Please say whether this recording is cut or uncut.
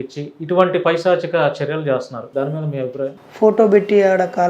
cut